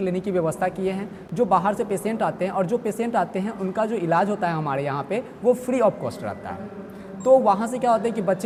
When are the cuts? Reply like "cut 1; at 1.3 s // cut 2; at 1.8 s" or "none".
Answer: none

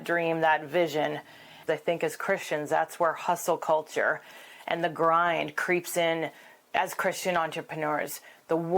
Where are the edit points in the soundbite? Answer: cut 1; at 1.6 s // cut 2; at 6.6 s

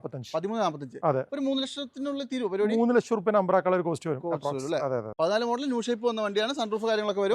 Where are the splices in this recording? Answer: cut 1; at 5.1 s

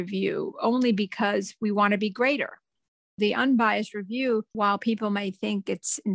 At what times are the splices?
cut 1; at 2.8 s // cut 2; at 4.5 s

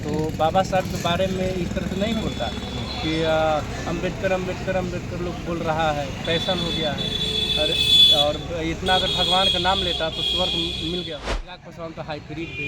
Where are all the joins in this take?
cut 1; at 11.6 s

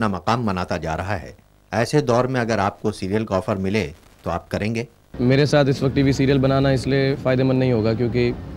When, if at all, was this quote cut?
cut 1; at 5.1 s

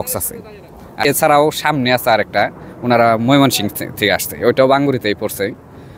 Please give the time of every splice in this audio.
cut 1; at 1.0 s

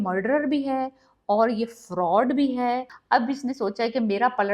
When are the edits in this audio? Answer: cut 1; at 2.9 s

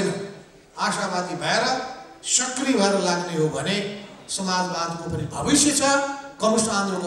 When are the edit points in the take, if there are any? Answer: none

